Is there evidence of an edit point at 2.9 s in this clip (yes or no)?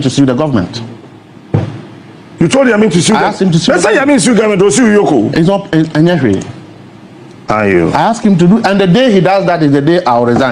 no